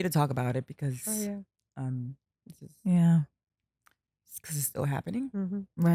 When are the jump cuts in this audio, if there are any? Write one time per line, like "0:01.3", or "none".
none